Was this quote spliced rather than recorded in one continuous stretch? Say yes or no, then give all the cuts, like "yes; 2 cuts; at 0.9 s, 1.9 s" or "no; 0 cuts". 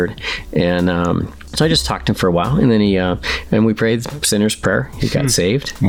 yes; 1 cut; at 1.4 s